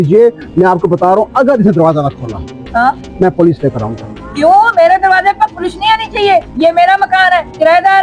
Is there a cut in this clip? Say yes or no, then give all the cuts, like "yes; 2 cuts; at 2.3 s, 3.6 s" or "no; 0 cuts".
no; 0 cuts